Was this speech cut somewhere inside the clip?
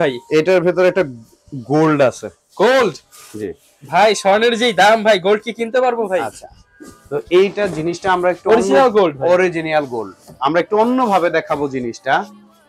no; 0 cuts

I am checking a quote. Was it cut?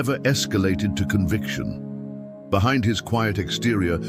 no; 0 cuts

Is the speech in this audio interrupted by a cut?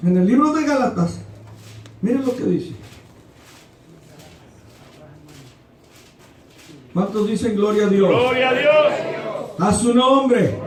no; 0 cuts

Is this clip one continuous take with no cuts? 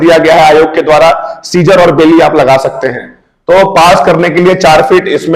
yes; 0 cuts

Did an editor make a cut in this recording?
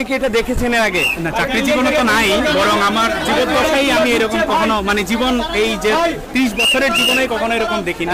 no; 0 cuts

